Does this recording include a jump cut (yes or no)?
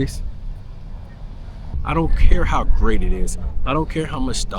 yes